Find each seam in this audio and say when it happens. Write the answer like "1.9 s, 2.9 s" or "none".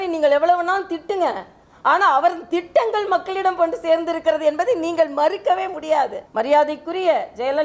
6.2 s